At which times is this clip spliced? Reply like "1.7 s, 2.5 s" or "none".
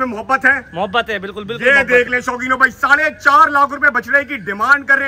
none

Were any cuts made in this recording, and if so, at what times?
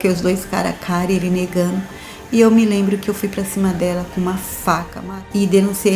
5.0 s

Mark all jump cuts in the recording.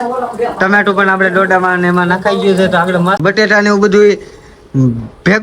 3.2 s

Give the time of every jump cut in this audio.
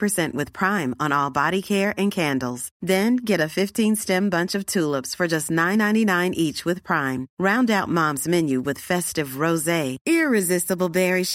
none

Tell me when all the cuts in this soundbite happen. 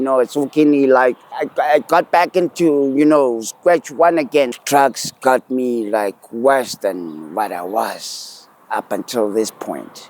1.3 s, 4.5 s

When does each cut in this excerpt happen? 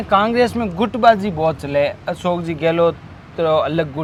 none

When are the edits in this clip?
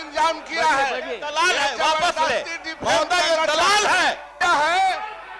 4.3 s

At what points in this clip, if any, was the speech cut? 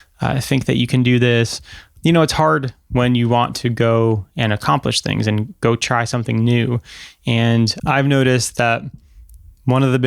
1.9 s, 7.8 s

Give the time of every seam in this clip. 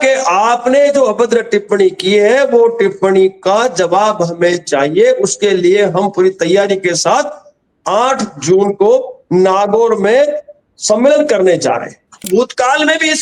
12.3 s

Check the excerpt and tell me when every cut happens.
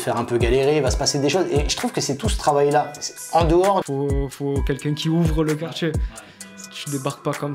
3.8 s

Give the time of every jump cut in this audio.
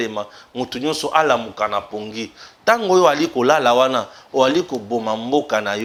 none

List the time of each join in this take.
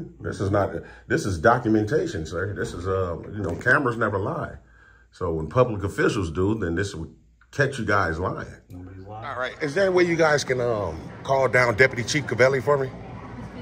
9.5 s

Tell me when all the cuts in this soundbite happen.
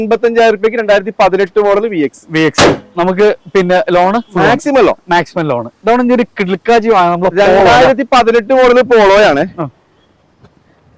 none

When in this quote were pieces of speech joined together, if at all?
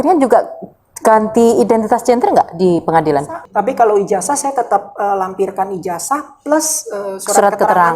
3.4 s

